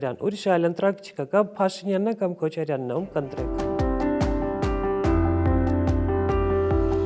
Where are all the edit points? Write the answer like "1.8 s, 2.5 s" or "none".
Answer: 3.4 s